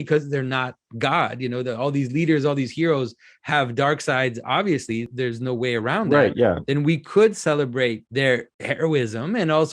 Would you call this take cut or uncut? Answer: cut